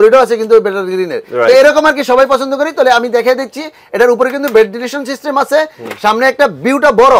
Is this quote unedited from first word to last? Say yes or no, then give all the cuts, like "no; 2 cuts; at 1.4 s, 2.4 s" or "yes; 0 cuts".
yes; 0 cuts